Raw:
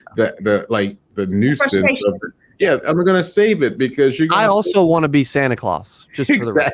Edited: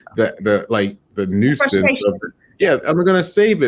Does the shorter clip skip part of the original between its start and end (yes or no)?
no